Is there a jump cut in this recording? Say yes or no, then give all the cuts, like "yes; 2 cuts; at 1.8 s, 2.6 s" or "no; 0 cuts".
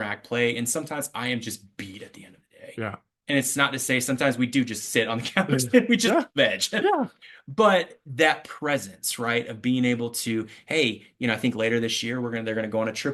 no; 0 cuts